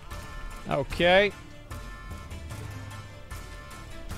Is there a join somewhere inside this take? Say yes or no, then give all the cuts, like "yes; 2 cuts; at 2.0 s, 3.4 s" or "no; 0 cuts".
no; 0 cuts